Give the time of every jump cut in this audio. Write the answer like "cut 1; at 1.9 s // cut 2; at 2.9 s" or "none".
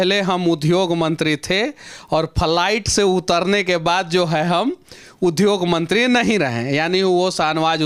none